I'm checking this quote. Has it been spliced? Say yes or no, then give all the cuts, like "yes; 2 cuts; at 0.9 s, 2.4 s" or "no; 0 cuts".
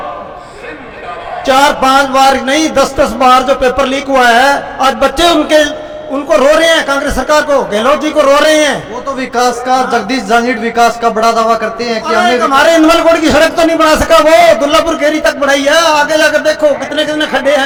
no; 0 cuts